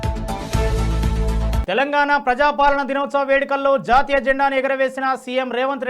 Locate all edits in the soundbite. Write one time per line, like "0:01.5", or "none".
none

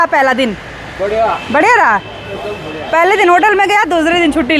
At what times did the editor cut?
none

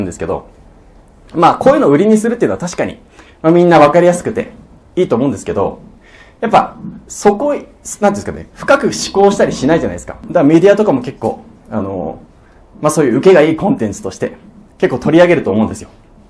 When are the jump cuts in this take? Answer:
0:10.1

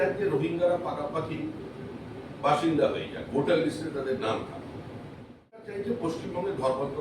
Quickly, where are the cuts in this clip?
0:05.6

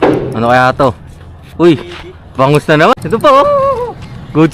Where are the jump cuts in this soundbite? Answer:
0:02.9

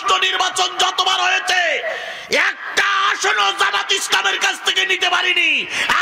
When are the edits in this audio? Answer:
none

